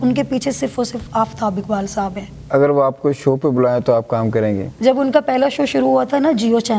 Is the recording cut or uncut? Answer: cut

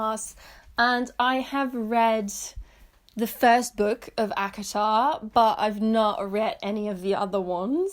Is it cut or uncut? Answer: uncut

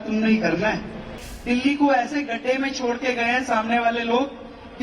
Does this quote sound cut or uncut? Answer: cut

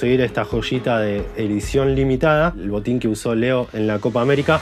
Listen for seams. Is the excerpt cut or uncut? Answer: cut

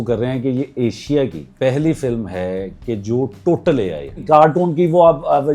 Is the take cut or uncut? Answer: cut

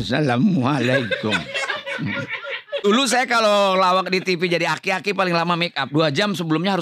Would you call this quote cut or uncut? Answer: cut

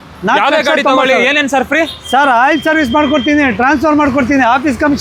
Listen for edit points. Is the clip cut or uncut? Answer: uncut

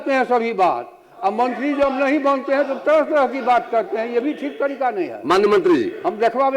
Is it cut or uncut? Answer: uncut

